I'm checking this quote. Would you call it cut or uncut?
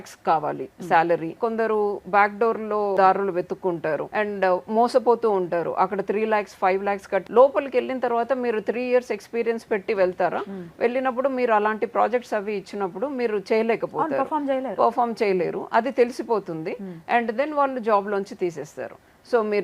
cut